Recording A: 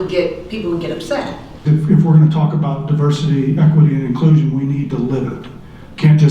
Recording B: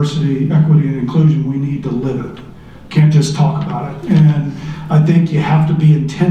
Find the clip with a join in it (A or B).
A